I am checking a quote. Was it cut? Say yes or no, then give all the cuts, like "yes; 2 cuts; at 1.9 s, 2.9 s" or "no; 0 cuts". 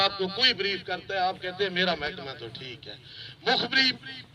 no; 0 cuts